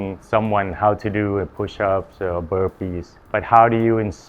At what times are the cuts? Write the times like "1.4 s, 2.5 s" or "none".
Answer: 3.1 s